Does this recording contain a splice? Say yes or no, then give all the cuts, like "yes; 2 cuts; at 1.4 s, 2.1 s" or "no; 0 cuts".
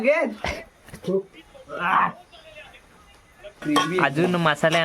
yes; 1 cut; at 3.5 s